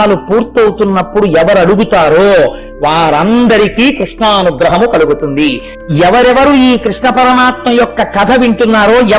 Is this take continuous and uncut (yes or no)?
no